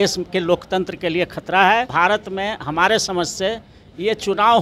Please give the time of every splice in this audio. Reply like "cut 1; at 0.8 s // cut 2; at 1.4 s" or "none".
cut 1; at 1.9 s